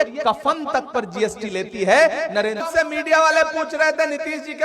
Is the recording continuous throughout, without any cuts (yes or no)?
no